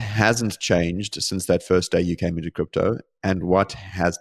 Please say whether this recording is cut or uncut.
uncut